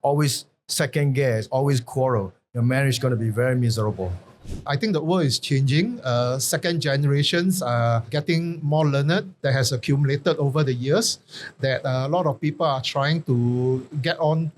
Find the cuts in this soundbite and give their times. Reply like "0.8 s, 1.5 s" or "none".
4.7 s, 9.3 s